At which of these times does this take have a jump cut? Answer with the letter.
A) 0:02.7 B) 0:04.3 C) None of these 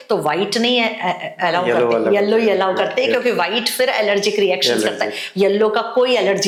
C